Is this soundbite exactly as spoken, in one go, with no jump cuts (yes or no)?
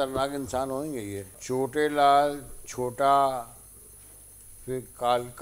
no